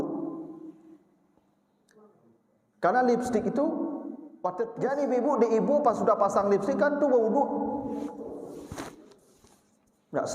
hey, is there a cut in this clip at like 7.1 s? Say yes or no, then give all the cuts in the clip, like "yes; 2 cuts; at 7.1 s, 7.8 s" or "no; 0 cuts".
no; 1 cut; at 4.6 s